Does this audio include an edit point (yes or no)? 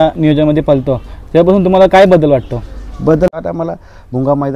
yes